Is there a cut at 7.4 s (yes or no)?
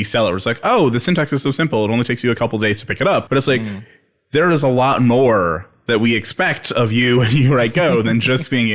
no